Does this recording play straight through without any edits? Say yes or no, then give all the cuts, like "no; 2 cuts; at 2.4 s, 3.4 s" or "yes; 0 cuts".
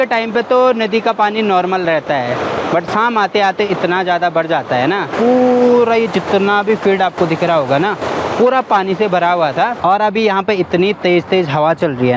no; 2 cuts; at 5.1 s, 9.8 s